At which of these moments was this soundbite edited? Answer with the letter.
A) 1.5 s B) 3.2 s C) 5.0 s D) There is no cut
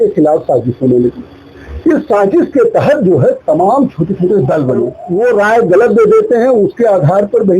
C